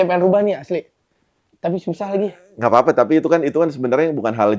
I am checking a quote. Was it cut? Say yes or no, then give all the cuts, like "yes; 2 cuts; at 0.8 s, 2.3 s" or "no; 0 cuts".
no; 0 cuts